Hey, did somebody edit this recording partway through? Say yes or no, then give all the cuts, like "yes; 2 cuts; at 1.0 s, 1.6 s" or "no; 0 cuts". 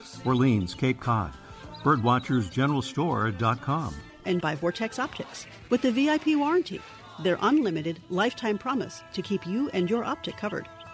no; 0 cuts